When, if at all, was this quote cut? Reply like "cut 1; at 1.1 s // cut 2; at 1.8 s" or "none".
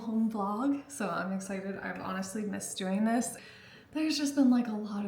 cut 1; at 3.4 s